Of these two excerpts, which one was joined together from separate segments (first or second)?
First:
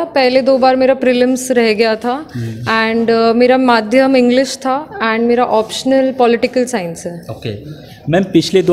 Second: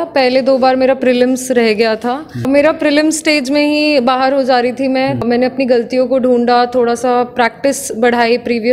second